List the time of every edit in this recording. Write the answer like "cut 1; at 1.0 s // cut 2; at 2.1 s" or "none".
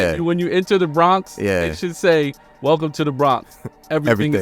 none

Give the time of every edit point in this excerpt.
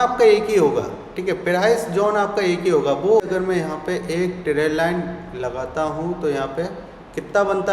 cut 1; at 3.2 s

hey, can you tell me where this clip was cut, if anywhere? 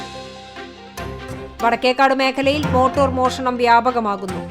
cut 1; at 1.4 s

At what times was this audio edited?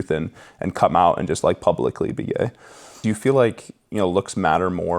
cut 1; at 2.9 s

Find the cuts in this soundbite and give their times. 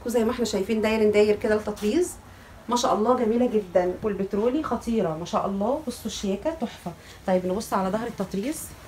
cut 1; at 4.0 s

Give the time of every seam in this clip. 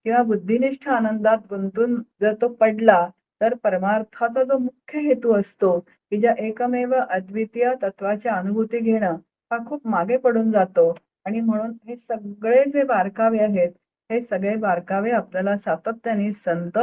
cut 1; at 2.1 s

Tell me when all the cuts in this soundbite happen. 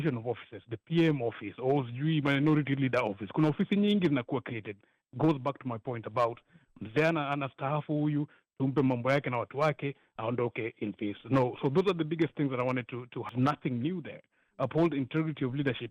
cut 1; at 13.3 s

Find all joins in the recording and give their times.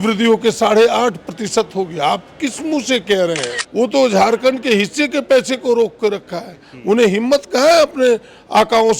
cut 1; at 3.5 s

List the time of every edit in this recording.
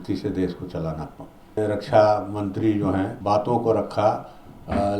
cut 1; at 1.6 s // cut 2; at 3.2 s

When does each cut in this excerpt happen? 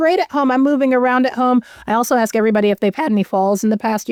none

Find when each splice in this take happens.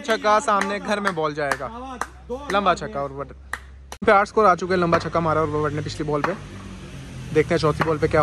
none

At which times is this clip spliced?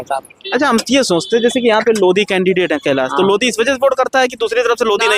none

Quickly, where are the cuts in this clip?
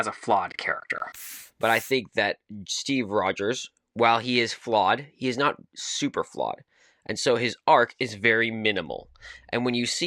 cut 1; at 1.4 s

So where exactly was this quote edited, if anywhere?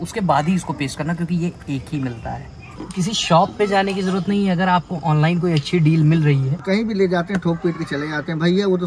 cut 1; at 2.7 s // cut 2; at 6.5 s

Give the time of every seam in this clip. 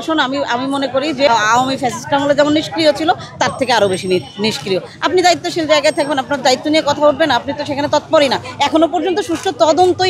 cut 1; at 1.3 s

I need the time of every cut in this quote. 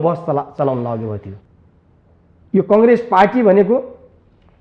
cut 1; at 1.4 s

